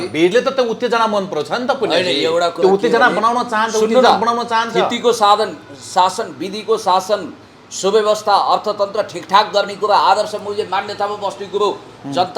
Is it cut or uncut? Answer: uncut